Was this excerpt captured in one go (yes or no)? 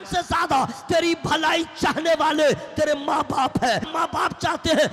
no